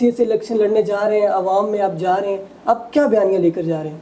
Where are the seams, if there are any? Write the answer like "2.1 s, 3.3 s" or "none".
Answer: none